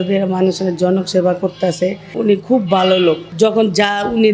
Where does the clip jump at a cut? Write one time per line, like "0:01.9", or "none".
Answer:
0:02.0
0:03.3